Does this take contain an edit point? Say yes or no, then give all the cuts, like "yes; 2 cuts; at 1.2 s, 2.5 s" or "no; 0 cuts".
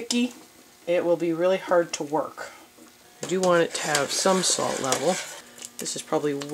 yes; 2 cuts; at 3.0 s, 5.3 s